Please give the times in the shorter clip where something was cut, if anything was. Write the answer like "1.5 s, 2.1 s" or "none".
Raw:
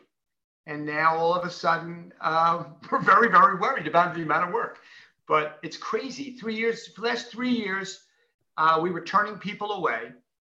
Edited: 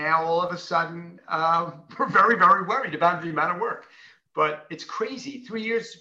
none